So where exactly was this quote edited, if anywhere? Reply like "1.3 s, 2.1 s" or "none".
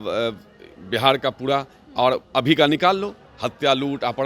none